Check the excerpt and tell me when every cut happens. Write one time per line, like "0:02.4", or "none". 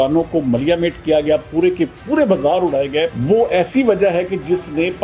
0:03.2